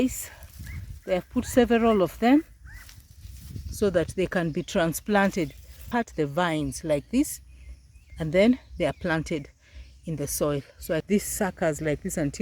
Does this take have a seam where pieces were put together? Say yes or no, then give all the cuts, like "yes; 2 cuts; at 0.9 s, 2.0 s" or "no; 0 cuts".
yes; 2 cuts; at 5.7 s, 11.0 s